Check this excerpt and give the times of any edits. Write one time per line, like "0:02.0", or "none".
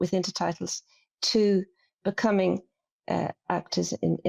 0:02.9